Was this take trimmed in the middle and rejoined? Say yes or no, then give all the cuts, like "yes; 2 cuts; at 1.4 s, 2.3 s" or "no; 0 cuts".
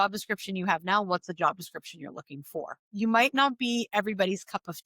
yes; 1 cut; at 2.9 s